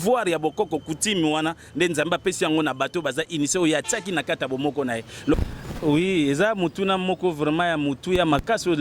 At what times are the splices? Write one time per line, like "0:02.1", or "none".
0:05.4